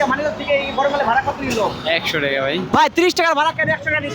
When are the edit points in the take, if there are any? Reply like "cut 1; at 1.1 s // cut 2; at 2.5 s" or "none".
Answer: cut 1; at 2.7 s